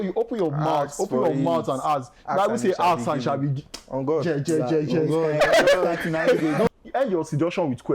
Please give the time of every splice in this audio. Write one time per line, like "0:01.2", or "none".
0:06.7